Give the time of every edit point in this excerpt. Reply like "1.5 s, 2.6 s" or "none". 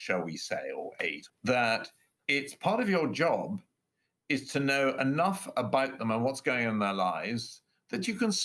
1.2 s